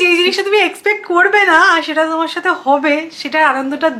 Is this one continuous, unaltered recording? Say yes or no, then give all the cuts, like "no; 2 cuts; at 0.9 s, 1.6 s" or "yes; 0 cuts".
yes; 0 cuts